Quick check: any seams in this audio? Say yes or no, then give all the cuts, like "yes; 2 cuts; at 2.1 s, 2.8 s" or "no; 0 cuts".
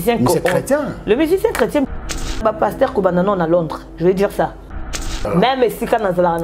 yes; 2 cuts; at 2.4 s, 5.0 s